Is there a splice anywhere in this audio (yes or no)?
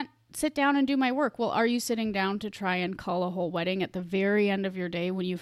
no